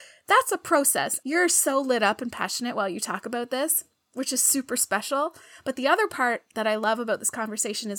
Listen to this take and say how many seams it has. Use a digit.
1